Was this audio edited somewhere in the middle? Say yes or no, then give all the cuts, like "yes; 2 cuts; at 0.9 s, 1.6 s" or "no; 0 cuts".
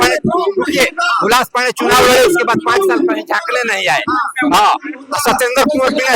no; 0 cuts